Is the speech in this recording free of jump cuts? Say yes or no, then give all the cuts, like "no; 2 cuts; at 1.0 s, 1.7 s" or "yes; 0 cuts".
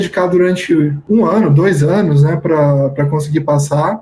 yes; 0 cuts